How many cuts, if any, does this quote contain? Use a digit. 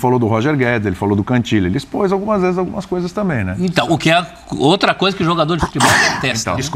0